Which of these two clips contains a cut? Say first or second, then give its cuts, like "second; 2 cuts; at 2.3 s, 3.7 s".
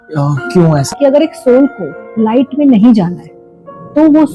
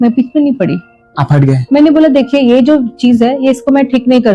first; 1 cut; at 0.9 s